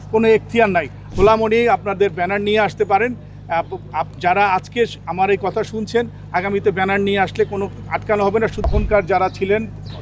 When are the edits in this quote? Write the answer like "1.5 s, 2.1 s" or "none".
1.0 s, 8.6 s